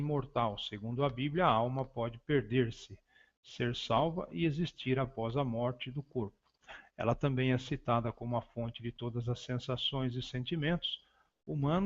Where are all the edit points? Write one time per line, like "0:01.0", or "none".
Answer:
0:05.9